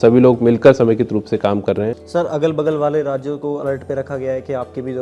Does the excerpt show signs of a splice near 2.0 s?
yes; 1 cut; at 2.0 s

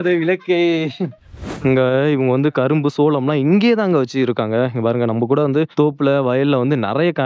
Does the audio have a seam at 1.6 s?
yes; 2 cuts; at 1.6 s, 5.7 s

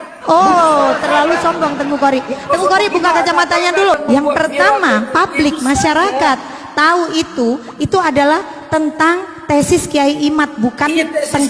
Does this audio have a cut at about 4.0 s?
yes; 1 cut; at 4.0 s

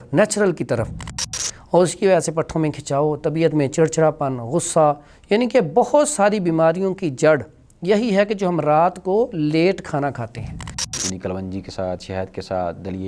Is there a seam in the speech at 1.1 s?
yes; 2 cuts; at 1.1 s, 11.0 s

